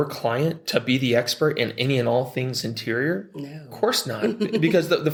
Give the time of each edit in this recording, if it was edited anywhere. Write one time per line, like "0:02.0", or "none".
none